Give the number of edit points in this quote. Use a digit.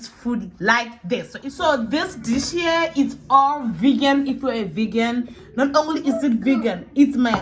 1